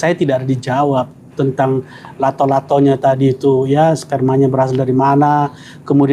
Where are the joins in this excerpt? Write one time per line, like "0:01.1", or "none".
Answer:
none